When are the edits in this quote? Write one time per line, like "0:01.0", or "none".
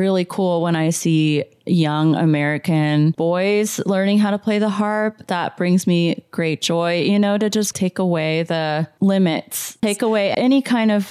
0:03.2
0:09.8